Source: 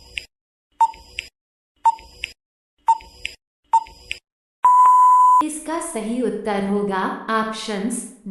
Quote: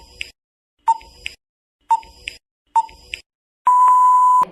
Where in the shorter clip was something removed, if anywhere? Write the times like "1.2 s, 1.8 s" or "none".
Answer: none